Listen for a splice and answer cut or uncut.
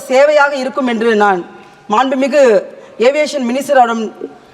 uncut